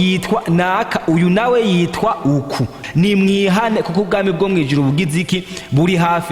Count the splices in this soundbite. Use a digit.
1